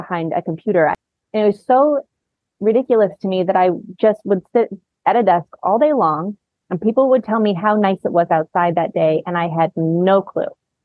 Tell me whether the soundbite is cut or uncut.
cut